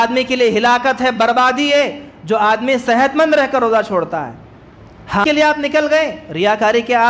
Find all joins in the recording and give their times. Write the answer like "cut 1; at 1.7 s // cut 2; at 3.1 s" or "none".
cut 1; at 5.2 s